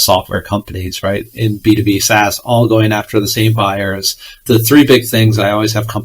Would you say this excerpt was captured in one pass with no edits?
no; 1 cut; at 4.4 s

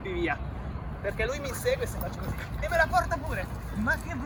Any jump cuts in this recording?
no; 0 cuts

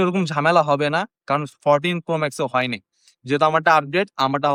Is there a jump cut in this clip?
no; 0 cuts

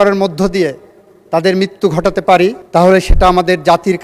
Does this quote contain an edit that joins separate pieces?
yes; 1 cut; at 2.6 s

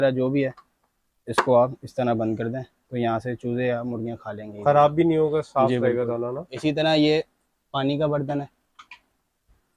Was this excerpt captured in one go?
yes; 0 cuts

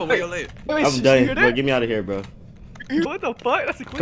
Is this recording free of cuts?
no; 1 cut; at 3.1 s

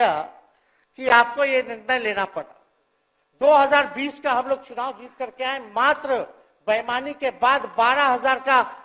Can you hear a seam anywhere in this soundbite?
no; 0 cuts

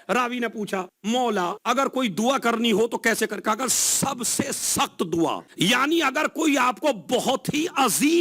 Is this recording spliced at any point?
yes; 3 cuts; at 0.9 s, 1.6 s, 5.5 s

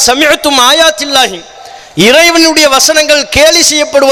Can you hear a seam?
no; 0 cuts

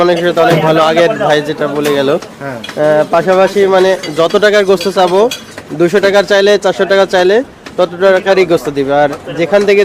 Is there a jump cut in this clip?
no; 0 cuts

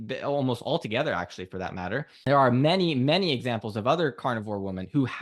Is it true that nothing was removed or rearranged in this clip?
no; 1 cut; at 2.1 s

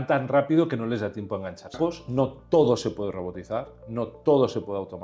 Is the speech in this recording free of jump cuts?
no; 1 cut; at 1.7 s

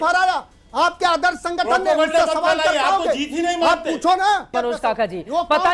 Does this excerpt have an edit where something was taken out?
yes; 1 cut; at 4.5 s

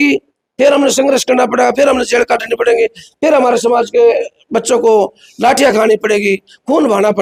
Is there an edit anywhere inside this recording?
no; 0 cuts

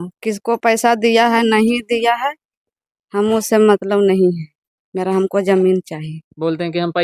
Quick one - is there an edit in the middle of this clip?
no; 0 cuts

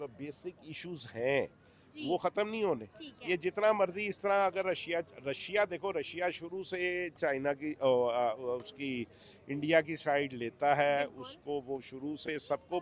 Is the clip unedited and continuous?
yes; 0 cuts

